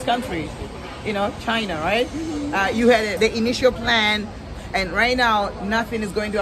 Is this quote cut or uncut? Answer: cut